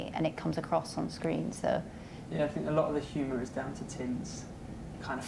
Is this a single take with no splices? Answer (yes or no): no